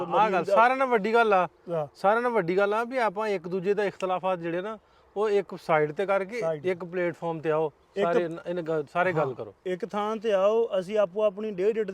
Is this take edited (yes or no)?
no